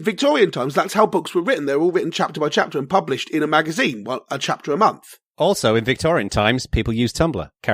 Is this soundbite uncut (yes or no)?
no